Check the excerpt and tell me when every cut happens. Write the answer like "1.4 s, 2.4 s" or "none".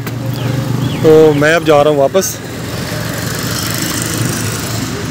none